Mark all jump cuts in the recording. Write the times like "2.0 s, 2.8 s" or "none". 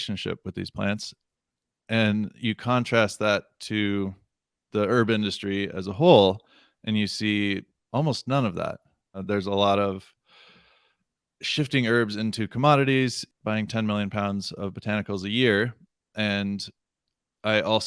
9.2 s, 13.2 s